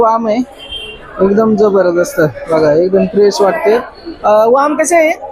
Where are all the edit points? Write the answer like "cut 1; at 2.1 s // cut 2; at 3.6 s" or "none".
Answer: none